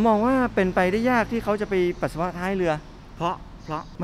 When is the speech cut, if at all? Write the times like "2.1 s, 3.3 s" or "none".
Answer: none